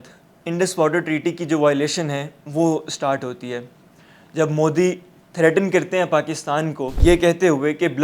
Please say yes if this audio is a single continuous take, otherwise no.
no